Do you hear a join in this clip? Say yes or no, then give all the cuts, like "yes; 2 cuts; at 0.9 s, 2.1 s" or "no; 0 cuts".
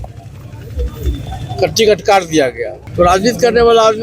yes; 1 cut; at 2.7 s